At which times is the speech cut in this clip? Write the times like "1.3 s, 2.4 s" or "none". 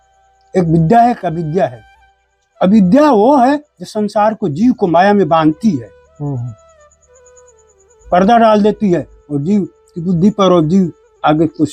none